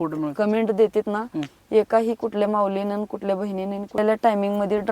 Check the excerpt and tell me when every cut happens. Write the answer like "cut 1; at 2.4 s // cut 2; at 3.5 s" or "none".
cut 1; at 4.0 s